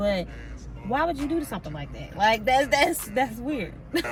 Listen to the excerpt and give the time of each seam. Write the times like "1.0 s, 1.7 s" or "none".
none